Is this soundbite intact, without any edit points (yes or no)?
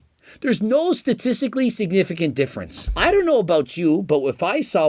no